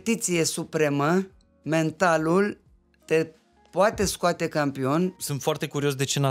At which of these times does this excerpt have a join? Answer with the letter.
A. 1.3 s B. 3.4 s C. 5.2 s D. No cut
C